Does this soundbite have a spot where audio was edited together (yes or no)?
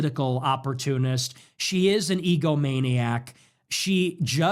no